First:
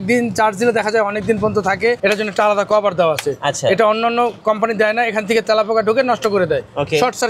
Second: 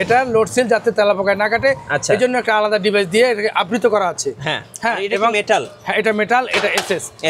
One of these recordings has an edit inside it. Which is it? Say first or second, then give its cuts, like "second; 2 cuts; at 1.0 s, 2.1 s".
first; 1 cut; at 2.0 s